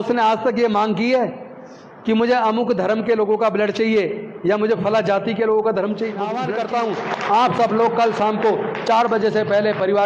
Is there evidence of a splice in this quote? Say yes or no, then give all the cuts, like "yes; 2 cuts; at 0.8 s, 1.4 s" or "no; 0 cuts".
yes; 1 cut; at 6.4 s